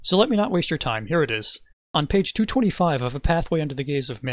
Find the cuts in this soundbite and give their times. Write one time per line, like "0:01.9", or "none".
none